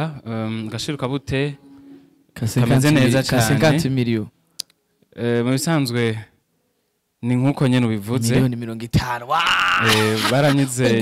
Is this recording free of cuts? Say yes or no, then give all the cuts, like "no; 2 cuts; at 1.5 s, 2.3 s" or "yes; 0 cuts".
yes; 0 cuts